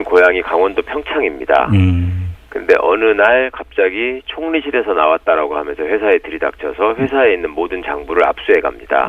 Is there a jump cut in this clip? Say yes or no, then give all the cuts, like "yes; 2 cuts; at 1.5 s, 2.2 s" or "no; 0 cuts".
yes; 1 cut; at 8.1 s